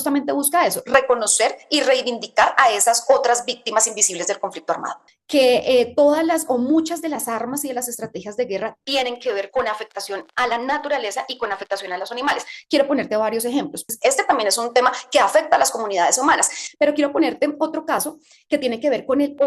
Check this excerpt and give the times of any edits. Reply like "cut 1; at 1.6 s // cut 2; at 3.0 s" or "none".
cut 1; at 5.1 s // cut 2; at 13.8 s